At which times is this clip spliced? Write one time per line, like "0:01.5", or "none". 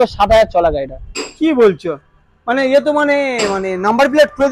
none